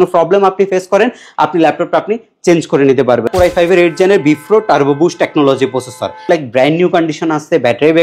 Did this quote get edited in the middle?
yes; 2 cuts; at 3.3 s, 6.2 s

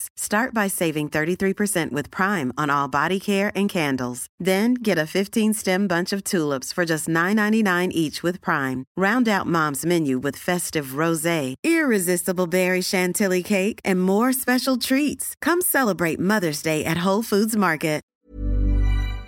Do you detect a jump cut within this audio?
yes; 1 cut; at 18.1 s

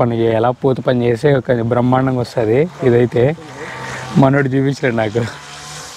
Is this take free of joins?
yes; 0 cuts

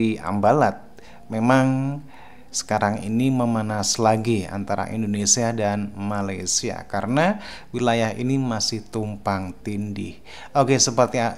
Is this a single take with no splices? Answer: yes; 0 cuts

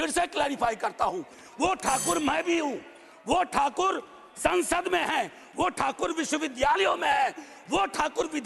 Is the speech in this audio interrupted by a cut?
no; 0 cuts

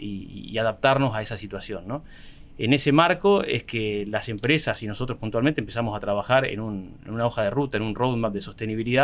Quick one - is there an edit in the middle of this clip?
no; 0 cuts

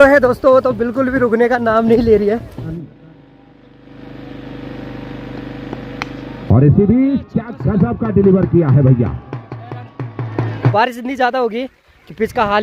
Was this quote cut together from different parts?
yes; 2 cuts; at 2.8 s, 10.7 s

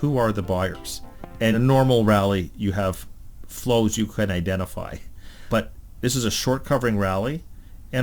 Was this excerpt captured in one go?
no; 2 cuts; at 1.5 s, 5.4 s

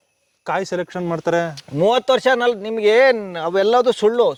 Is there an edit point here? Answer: no; 0 cuts

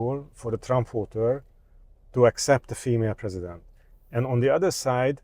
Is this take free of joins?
yes; 0 cuts

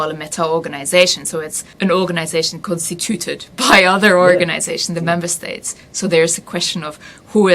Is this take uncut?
no; 1 cut; at 1.6 s

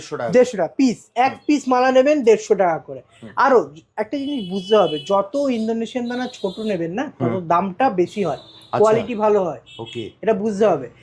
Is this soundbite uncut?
yes; 0 cuts

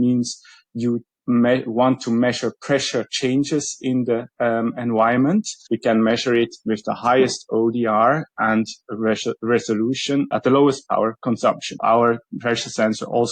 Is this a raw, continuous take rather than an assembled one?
no; 3 cuts; at 5.6 s, 10.3 s, 11.8 s

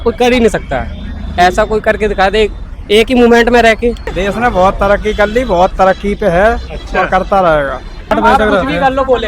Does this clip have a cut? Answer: yes; 2 cuts; at 4.1 s, 8.1 s

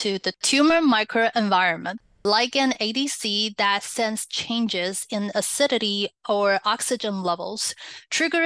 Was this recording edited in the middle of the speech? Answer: yes; 1 cut; at 2.2 s

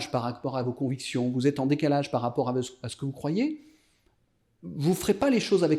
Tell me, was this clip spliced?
no; 0 cuts

